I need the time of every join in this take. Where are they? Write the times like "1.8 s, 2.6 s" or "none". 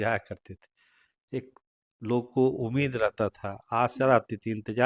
none